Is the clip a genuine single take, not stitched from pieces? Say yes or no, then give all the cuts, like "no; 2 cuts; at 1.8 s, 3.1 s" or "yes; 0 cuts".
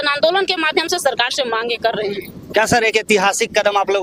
yes; 0 cuts